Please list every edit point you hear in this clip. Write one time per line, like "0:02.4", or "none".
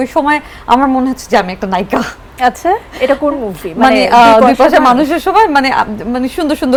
none